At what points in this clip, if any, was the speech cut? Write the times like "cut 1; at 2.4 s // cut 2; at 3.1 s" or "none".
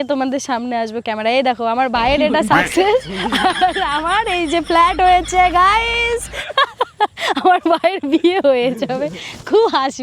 none